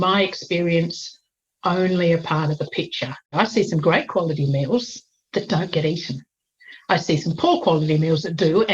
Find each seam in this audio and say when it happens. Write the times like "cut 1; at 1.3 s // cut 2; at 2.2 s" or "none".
cut 1; at 3.2 s